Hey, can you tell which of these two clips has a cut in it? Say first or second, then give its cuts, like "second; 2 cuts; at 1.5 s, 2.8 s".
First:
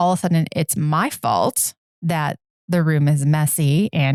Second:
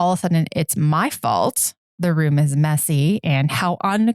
second; 1 cut; at 1.8 s